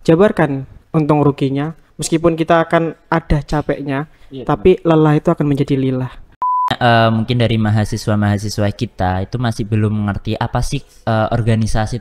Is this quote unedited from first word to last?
no; 1 cut; at 6.8 s

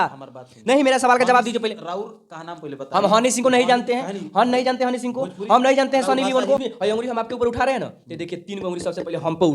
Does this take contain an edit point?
yes; 1 cut; at 6.6 s

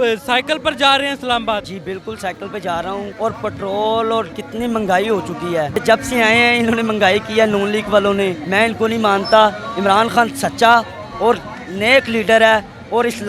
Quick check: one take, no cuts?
yes; 0 cuts

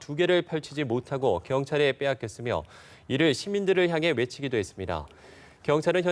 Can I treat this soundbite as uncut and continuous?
yes; 0 cuts

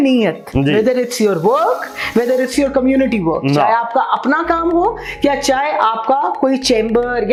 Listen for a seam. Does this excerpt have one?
no; 0 cuts

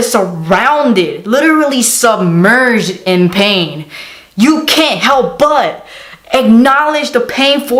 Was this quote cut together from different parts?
no; 0 cuts

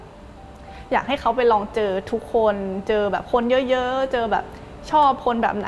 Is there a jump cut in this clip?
no; 0 cuts

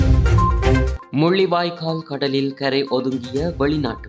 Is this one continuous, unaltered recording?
yes; 0 cuts

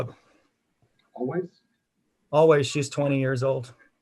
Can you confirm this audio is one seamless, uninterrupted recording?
yes; 0 cuts

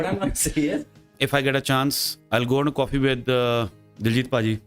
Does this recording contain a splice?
yes; 1 cut; at 1.0 s

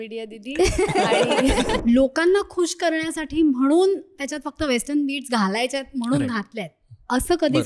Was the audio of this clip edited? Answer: yes; 1 cut; at 1.8 s

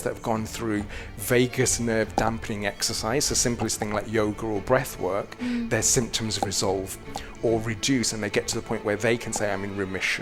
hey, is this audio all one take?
yes; 0 cuts

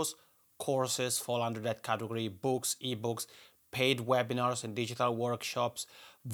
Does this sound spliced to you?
no; 0 cuts

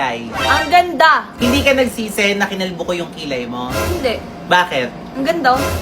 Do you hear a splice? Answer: yes; 1 cut; at 1.3 s

